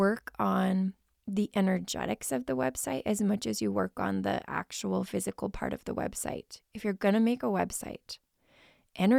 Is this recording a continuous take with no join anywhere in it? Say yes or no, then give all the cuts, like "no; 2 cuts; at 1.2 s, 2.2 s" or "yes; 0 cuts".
yes; 0 cuts